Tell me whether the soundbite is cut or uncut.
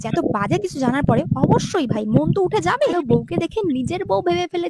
cut